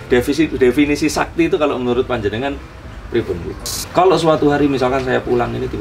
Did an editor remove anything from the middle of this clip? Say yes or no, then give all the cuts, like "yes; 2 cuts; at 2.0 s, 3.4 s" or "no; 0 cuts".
yes; 1 cut; at 3.7 s